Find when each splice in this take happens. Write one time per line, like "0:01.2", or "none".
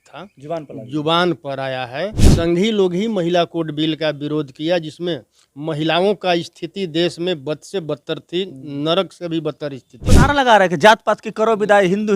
0:02.2
0:10.1